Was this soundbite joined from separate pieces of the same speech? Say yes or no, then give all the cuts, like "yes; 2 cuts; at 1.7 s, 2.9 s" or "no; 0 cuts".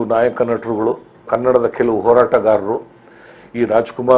yes; 1 cut; at 1.3 s